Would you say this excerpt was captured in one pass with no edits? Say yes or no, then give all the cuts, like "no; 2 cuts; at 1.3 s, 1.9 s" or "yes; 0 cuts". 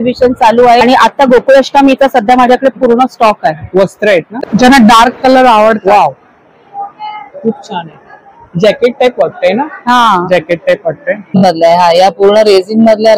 no; 3 cuts; at 0.8 s, 4.4 s, 11.4 s